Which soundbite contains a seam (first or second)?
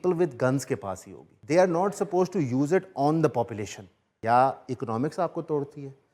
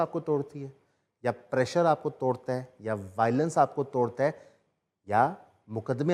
first